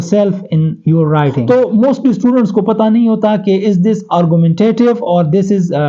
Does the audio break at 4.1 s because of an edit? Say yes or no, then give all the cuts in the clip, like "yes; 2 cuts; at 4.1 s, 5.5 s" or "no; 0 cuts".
no; 1 cut; at 1.4 s